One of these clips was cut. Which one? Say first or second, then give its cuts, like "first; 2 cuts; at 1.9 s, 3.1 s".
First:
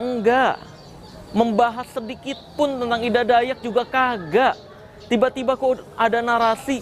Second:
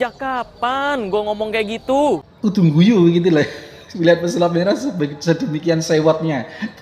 second; 1 cut; at 2.3 s